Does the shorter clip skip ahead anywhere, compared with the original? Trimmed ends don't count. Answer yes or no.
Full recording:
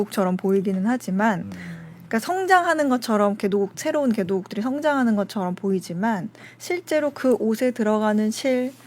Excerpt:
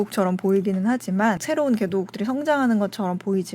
yes